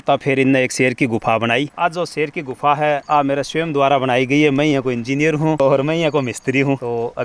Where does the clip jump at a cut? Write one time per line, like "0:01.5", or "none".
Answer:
none